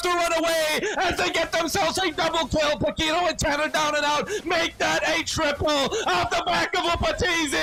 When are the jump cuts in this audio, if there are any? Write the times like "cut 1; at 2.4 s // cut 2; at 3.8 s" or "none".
none